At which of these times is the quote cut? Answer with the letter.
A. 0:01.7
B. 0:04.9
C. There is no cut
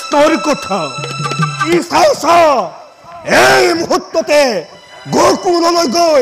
A